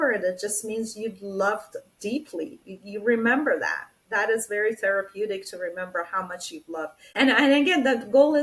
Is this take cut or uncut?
cut